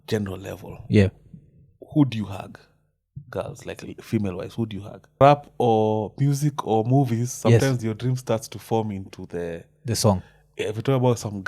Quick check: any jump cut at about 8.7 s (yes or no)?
no